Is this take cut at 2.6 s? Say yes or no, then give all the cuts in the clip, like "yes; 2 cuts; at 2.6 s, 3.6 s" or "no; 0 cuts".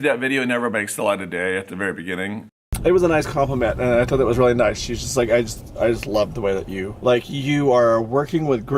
yes; 1 cut; at 2.6 s